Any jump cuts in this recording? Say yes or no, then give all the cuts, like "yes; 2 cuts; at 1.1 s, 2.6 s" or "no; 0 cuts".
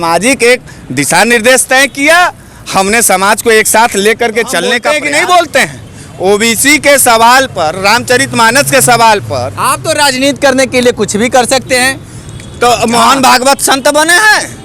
yes; 1 cut; at 4.8 s